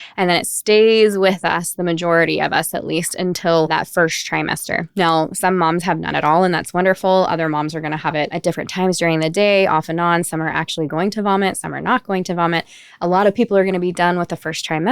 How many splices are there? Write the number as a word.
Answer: two